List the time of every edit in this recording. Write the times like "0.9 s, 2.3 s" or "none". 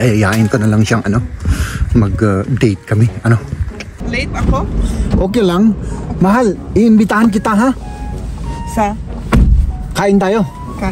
3.9 s